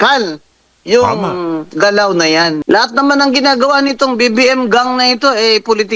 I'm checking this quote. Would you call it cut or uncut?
cut